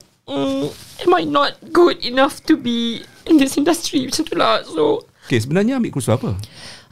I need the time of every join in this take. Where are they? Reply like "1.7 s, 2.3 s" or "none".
5.3 s